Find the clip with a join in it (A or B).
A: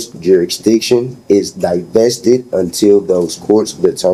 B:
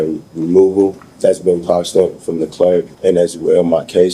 B